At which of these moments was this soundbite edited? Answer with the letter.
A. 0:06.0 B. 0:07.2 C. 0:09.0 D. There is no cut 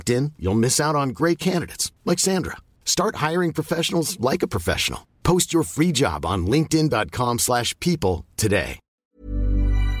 C